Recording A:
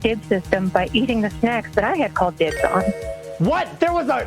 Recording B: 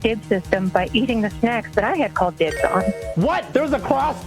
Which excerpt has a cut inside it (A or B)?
B